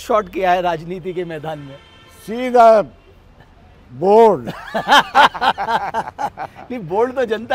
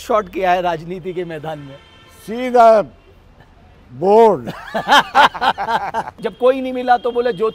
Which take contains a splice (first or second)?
second